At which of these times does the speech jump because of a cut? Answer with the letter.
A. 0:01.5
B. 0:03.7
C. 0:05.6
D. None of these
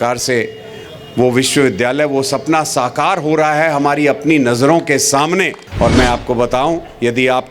C